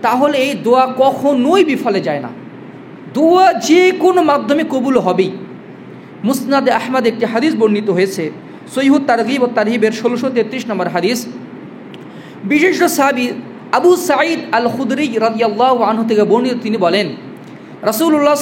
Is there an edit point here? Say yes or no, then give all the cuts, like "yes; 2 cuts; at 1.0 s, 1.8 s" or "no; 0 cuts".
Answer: no; 0 cuts